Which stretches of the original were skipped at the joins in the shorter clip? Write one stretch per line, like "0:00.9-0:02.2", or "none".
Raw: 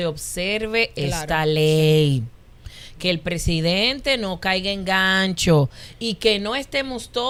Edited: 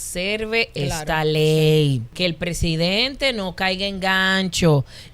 0:02.3-0:02.9